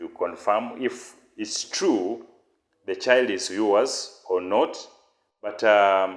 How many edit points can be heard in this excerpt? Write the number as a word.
zero